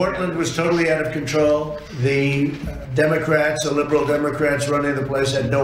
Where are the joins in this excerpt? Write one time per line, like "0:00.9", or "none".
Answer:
0:01.8
0:02.8